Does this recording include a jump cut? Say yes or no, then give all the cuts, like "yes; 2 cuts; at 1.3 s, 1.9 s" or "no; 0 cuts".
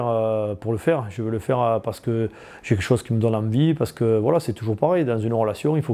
no; 0 cuts